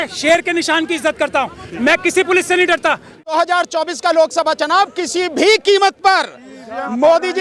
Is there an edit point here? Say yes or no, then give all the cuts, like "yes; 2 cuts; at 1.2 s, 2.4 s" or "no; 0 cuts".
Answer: yes; 1 cut; at 3.3 s